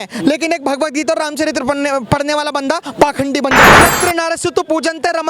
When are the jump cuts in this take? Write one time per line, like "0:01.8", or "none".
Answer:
0:03.8